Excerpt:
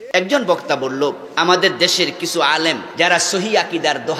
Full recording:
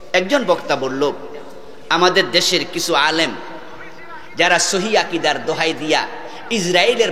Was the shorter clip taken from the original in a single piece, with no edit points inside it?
no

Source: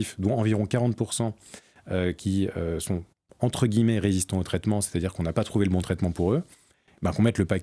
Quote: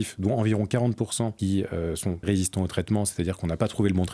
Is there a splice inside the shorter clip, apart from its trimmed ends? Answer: yes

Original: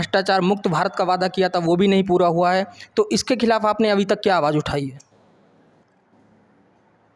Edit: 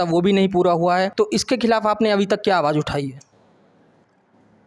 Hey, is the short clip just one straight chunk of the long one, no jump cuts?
no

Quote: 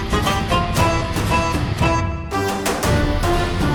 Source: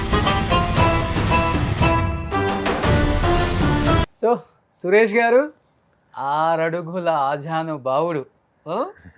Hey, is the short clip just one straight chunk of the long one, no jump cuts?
yes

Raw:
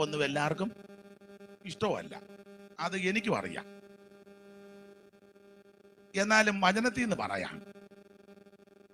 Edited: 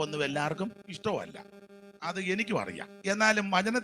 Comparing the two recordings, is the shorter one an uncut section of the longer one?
no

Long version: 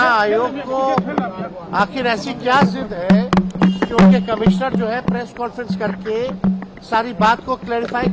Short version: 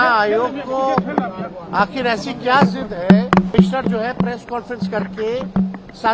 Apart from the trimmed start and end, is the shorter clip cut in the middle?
yes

